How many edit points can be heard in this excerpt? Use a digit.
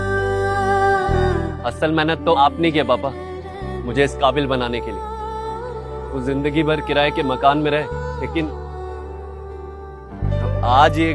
1